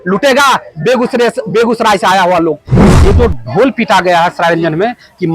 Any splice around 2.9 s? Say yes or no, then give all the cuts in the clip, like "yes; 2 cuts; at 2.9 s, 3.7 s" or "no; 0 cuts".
yes; 1 cut; at 2.9 s